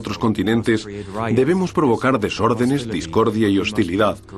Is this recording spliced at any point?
no; 0 cuts

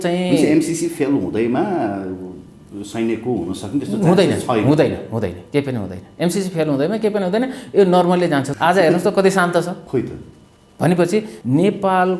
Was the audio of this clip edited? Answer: yes; 3 cuts; at 8.5 s, 9.8 s, 11.3 s

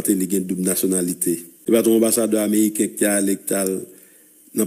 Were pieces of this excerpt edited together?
yes; 1 cut; at 1.5 s

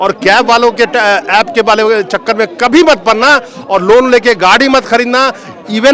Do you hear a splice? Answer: no; 0 cuts

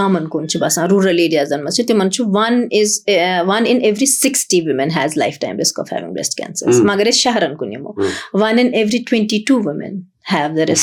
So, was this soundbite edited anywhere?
no; 0 cuts

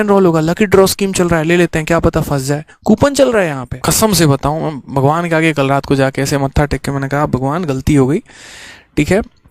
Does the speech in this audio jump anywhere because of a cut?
yes; 1 cut; at 3.7 s

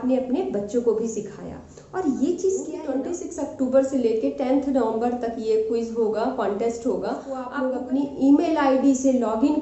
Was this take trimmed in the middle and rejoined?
yes; 2 cuts; at 2.8 s, 7.5 s

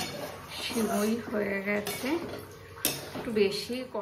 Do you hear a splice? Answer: no; 0 cuts

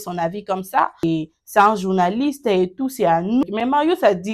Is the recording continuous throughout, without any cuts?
no; 2 cuts; at 1.0 s, 3.4 s

